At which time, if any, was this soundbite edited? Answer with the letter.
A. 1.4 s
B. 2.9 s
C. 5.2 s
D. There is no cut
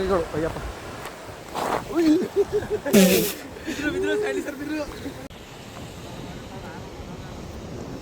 C